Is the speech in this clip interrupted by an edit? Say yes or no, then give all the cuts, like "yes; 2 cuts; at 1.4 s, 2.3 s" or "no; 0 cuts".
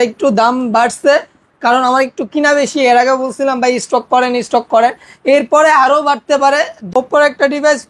yes; 1 cut; at 7.0 s